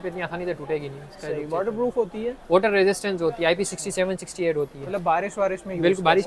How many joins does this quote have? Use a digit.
0